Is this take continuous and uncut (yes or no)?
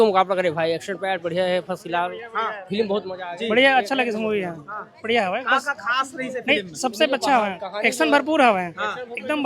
yes